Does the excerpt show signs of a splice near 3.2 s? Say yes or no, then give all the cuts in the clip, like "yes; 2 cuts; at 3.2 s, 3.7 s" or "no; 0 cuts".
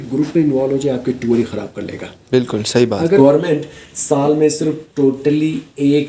yes; 1 cut; at 3.2 s